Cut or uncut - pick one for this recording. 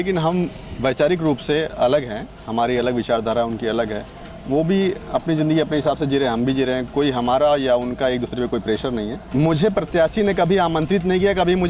cut